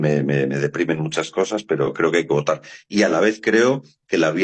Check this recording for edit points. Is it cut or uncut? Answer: uncut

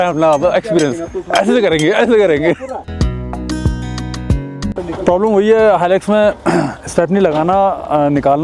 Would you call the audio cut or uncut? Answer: cut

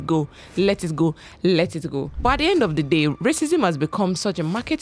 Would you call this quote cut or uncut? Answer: uncut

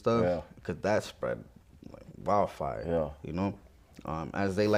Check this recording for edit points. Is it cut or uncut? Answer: uncut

